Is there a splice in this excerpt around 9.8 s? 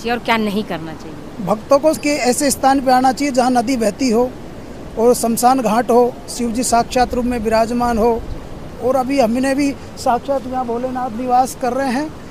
no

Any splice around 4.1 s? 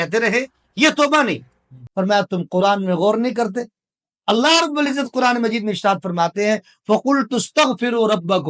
no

